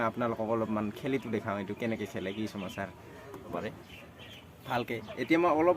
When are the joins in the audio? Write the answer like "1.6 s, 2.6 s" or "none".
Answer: 3.5 s